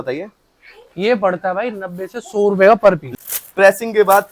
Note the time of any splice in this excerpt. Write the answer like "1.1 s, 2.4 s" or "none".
3.2 s